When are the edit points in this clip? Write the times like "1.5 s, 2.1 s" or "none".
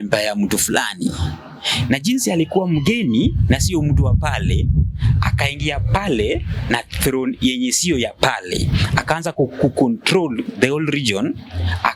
none